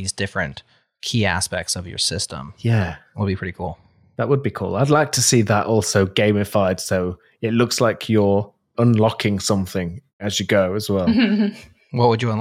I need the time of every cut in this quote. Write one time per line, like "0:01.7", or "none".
none